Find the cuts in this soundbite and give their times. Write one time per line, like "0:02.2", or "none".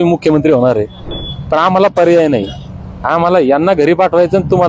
0:01.1